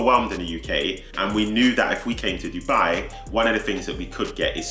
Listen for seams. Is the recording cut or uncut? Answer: cut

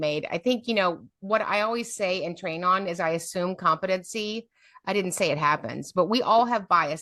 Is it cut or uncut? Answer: uncut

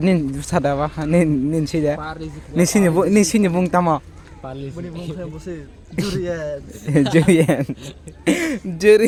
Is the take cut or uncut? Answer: uncut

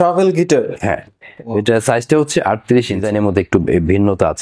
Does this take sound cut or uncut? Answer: cut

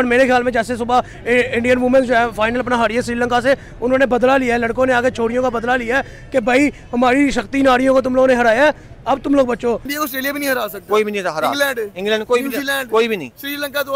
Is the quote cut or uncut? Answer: cut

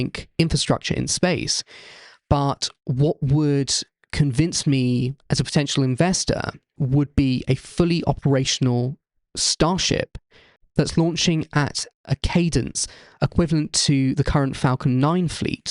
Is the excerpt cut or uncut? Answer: cut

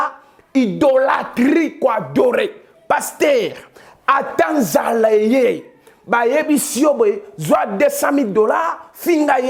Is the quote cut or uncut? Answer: uncut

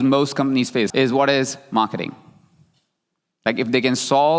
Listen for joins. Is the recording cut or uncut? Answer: cut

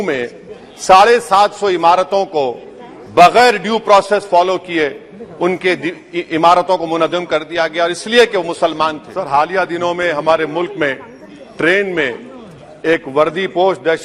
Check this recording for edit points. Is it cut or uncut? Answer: cut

